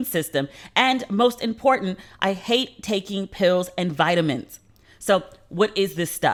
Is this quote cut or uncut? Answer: uncut